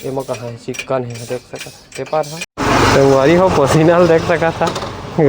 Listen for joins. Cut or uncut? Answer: cut